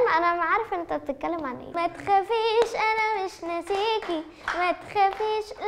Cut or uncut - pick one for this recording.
cut